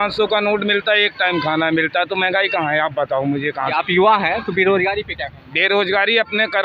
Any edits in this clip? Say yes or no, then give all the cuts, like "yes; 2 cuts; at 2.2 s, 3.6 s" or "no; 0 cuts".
yes; 1 cut; at 3.7 s